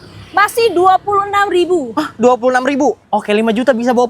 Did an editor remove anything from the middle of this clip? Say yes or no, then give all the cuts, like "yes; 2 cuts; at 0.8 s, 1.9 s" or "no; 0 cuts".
yes; 1 cut; at 3.0 s